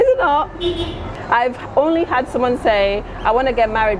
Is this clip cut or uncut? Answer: cut